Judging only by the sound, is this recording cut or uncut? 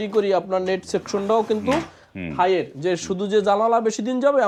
uncut